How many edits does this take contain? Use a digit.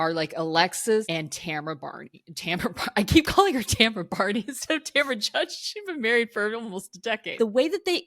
2